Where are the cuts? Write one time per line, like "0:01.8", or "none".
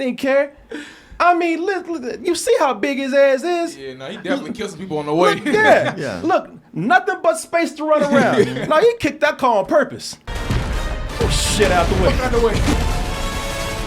0:12.7